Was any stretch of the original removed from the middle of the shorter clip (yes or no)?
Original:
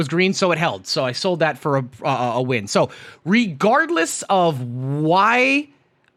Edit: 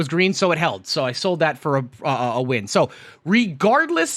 no